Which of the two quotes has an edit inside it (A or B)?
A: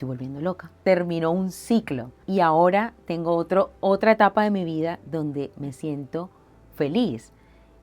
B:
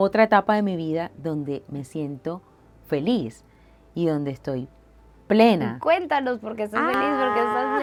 A